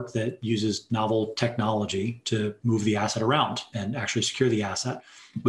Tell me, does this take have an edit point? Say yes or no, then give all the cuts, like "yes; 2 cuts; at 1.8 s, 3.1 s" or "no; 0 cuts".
yes; 2 cuts; at 2.6 s, 3.7 s